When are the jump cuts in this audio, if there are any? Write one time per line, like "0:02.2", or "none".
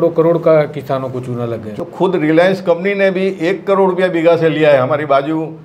0:01.7